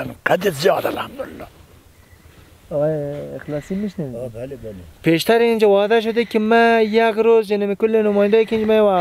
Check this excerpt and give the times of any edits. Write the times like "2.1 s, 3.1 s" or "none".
none